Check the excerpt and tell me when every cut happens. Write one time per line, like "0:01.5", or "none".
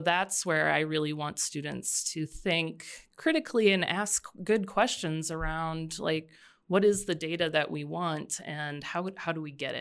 none